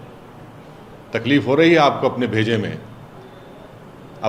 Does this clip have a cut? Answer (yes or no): no